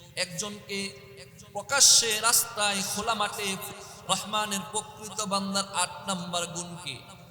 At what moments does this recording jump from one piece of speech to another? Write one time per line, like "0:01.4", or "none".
0:03.9

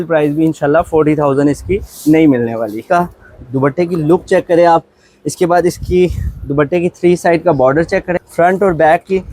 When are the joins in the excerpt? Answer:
0:02.8
0:08.1

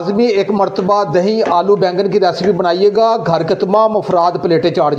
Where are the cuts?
none

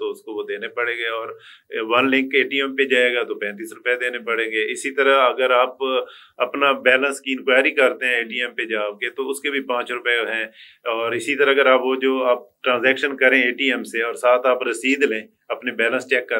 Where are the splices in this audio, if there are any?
none

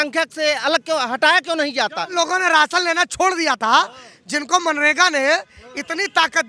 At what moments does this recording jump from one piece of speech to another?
0:02.1

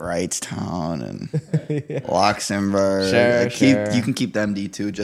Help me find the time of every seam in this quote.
none

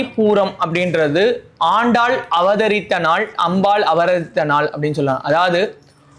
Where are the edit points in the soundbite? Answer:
none

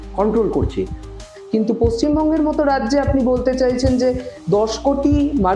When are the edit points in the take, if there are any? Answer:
0:01.0

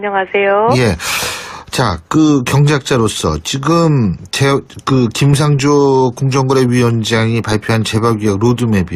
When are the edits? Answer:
none

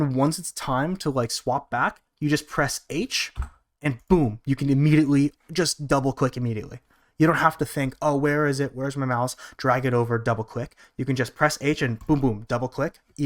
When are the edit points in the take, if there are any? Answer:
none

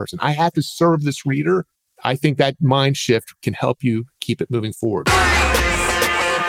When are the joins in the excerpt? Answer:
0:05.0

